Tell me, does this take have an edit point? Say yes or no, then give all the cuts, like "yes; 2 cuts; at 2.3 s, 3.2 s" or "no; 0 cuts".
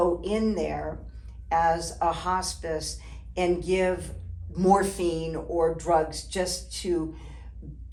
no; 0 cuts